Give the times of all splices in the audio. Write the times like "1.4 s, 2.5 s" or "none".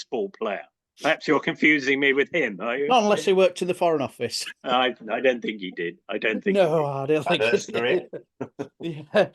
none